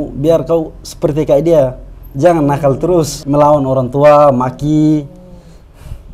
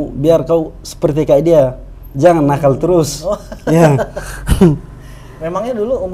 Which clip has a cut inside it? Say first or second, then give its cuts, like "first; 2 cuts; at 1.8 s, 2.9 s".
first; 1 cut; at 3.2 s